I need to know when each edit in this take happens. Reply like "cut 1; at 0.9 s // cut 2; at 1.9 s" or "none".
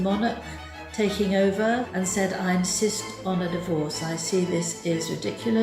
cut 1; at 1.9 s